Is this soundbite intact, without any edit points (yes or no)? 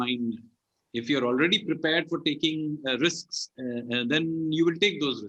yes